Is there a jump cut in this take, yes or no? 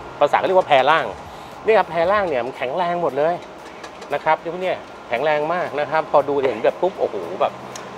no